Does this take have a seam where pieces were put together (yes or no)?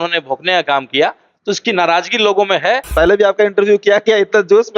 yes